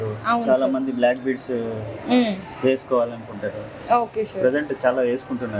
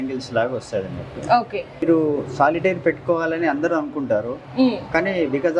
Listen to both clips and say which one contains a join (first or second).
second